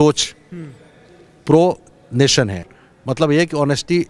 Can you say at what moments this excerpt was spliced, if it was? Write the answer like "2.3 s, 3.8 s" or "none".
2.7 s